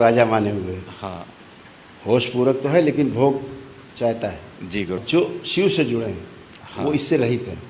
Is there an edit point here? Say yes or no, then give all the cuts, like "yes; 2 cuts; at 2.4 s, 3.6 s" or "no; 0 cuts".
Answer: yes; 1 cut; at 5.0 s